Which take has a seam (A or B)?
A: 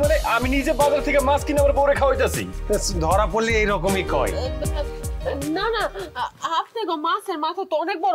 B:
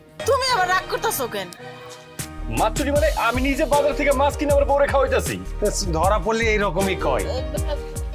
B